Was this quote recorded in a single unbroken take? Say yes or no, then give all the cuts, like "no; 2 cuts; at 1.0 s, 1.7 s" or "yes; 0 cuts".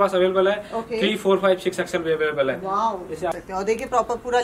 no; 1 cut; at 3.3 s